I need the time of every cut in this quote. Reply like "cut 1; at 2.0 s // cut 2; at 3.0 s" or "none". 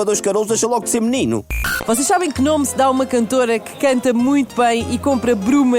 cut 1; at 1.7 s